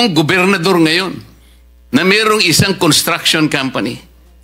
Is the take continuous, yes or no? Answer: yes